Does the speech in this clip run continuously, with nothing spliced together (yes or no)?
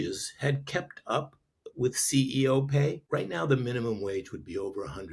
no